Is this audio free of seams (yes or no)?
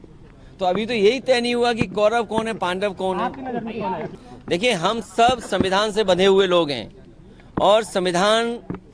no